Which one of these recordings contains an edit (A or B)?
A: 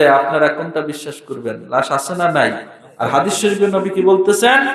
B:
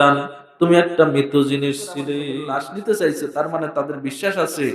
B